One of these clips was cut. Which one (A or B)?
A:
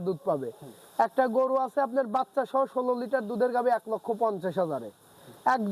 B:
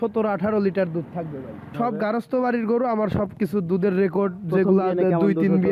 B